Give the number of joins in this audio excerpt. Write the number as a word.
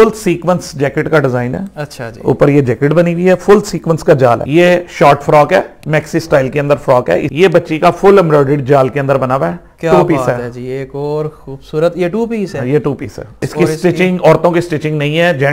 three